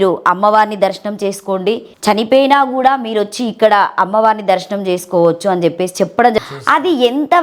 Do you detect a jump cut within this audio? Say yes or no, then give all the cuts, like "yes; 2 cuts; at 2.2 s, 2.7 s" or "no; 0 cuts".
yes; 2 cuts; at 1.9 s, 6.4 s